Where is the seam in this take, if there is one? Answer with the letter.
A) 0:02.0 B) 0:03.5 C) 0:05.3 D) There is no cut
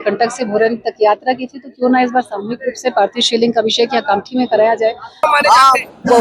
C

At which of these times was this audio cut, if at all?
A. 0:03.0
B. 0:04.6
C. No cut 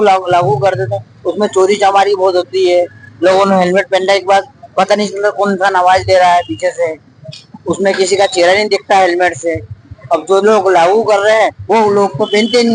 C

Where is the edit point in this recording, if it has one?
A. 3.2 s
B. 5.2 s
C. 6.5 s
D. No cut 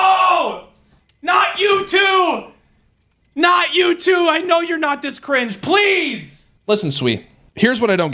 C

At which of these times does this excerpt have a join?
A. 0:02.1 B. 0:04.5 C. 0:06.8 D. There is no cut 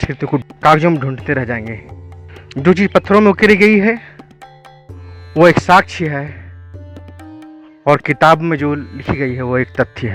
D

